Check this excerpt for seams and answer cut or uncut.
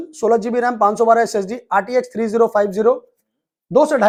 uncut